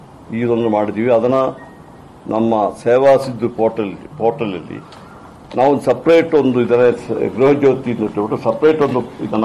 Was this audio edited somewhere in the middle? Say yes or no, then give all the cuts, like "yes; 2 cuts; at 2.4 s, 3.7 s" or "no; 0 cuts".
yes; 1 cut; at 3.3 s